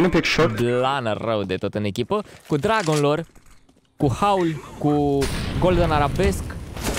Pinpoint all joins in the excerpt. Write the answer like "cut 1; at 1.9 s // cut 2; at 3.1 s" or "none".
none